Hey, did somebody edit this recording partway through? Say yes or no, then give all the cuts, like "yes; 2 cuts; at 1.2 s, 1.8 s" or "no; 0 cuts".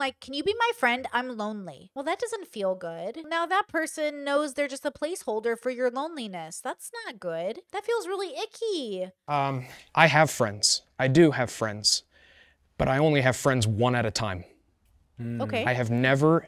yes; 4 cuts; at 1.8 s, 3.3 s, 7.6 s, 9.2 s